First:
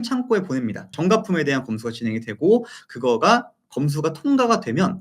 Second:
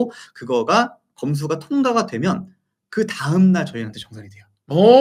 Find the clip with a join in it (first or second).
first